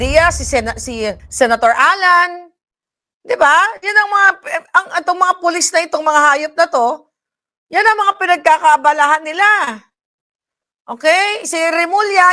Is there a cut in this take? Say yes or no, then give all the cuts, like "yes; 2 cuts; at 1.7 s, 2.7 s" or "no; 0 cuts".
yes; 1 cut; at 1.2 s